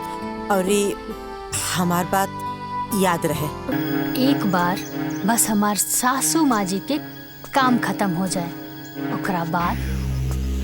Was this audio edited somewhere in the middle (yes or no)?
yes